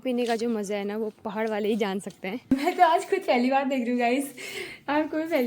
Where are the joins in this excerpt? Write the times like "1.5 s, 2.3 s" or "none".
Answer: 2.5 s